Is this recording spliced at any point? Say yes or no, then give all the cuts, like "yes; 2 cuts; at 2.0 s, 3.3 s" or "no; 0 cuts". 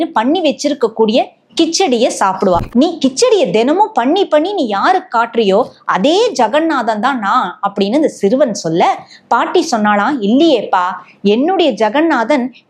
yes; 1 cut; at 2.7 s